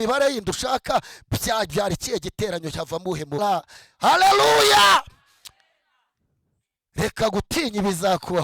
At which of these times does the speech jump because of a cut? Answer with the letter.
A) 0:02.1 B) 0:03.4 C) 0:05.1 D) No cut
B